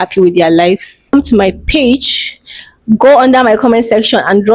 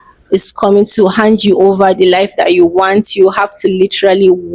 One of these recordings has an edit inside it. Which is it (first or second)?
first